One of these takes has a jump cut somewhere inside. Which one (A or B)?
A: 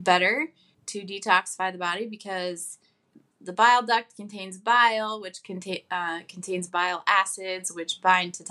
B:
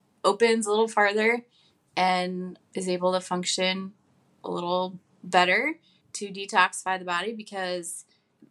B